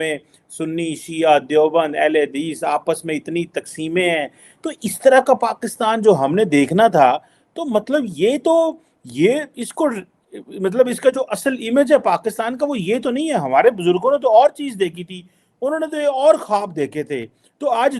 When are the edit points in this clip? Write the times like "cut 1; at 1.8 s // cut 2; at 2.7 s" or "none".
none